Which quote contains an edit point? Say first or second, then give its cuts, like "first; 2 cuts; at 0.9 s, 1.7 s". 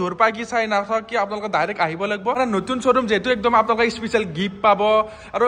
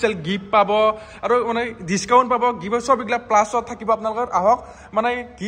first; 1 cut; at 2.4 s